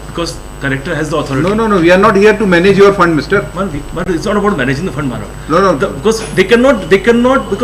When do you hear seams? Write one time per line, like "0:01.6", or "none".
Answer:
none